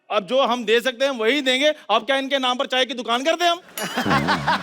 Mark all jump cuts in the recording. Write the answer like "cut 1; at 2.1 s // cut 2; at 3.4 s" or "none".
none